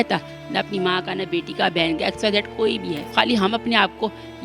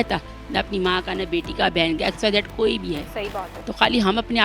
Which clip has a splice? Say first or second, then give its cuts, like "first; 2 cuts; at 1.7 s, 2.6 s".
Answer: first; 1 cut; at 3.0 s